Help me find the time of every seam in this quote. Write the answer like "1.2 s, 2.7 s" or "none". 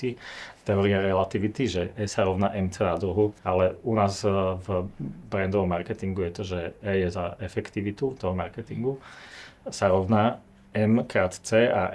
3.4 s